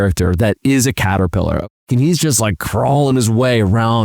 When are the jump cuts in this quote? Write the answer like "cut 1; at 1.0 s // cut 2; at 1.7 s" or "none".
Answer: cut 1; at 1.7 s